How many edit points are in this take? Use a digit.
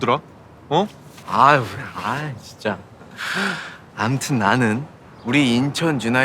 1